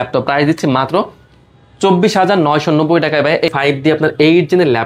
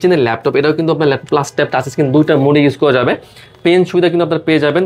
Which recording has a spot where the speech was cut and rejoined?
first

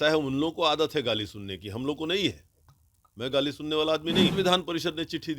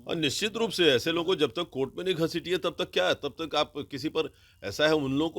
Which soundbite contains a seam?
first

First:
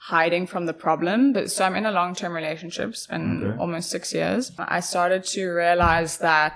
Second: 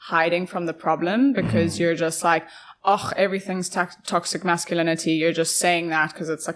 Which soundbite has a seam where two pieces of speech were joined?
first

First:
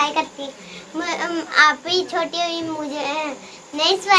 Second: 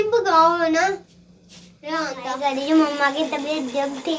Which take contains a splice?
second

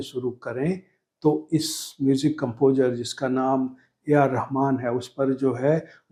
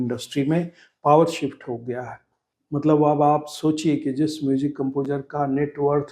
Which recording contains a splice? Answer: second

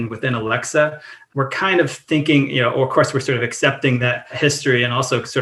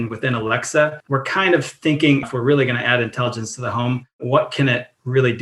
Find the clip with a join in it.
second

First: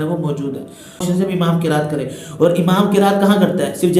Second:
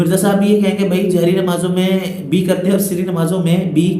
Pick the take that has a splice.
first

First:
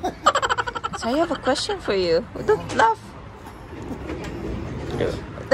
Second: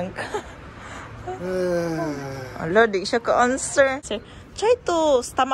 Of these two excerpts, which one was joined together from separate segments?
second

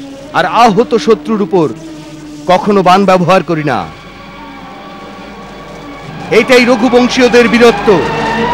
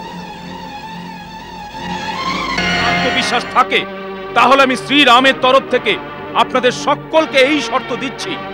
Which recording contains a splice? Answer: second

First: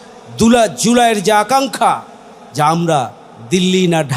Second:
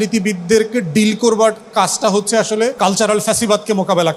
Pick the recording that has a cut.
second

